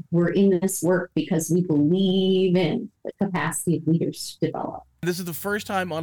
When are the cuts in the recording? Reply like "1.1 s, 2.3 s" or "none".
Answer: 5.0 s